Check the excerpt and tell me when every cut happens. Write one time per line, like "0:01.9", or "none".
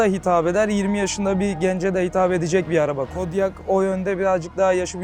none